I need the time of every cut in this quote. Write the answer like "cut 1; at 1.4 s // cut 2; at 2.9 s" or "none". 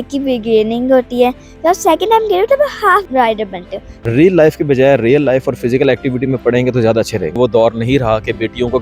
cut 1; at 3.5 s // cut 2; at 7.4 s